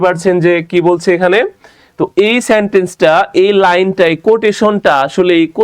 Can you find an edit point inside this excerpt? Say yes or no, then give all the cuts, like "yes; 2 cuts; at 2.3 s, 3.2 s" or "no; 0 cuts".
no; 0 cuts